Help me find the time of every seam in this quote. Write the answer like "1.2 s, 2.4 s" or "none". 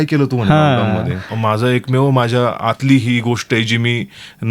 1.3 s